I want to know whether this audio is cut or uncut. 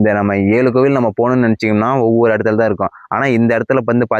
uncut